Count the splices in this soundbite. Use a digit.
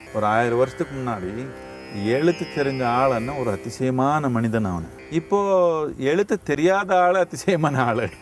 1